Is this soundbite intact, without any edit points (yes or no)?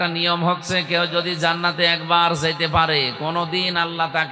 yes